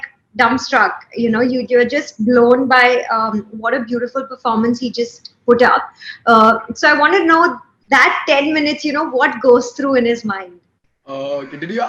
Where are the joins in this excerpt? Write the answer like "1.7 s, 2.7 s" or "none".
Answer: none